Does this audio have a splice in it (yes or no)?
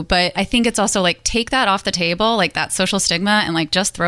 no